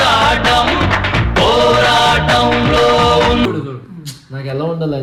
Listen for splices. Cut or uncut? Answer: uncut